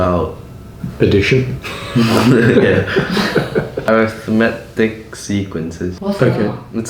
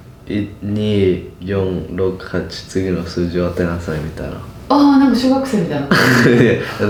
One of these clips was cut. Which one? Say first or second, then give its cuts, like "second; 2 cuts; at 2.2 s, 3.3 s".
first; 2 cuts; at 3.9 s, 5.9 s